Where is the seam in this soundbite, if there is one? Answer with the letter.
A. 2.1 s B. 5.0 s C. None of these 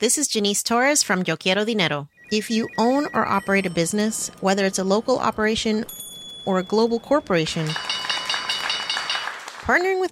A